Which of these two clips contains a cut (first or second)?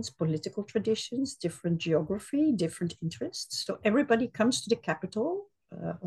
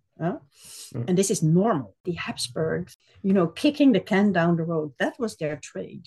second